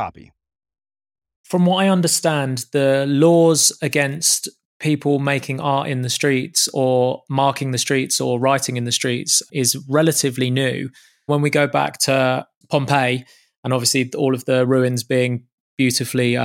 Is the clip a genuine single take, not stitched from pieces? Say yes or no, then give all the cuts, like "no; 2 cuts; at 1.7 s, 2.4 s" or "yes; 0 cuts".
no; 4 cuts; at 1.4 s, 9.4 s, 11.3 s, 12.5 s